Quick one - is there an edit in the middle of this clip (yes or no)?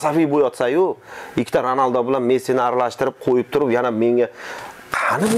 no